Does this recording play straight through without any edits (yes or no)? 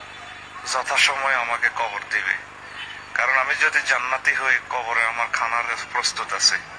yes